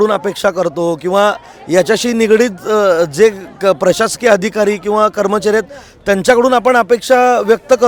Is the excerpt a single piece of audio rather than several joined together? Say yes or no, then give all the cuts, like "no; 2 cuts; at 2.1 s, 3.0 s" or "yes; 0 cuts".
yes; 0 cuts